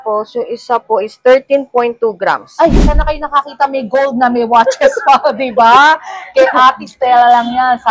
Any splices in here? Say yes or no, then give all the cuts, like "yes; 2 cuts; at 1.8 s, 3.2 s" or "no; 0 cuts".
yes; 1 cut; at 2.7 s